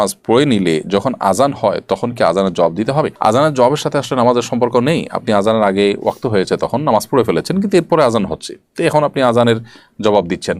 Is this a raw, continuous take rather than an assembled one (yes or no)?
yes